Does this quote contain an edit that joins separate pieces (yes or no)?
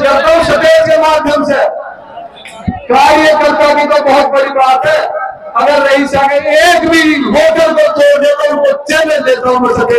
no